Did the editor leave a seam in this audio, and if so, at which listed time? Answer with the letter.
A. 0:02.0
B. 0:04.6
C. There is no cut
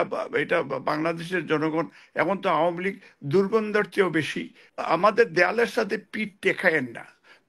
B